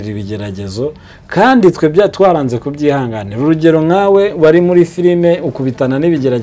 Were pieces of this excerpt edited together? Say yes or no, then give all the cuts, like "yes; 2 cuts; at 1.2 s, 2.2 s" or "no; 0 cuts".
no; 0 cuts